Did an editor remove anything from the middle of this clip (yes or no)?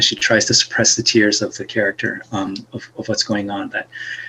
no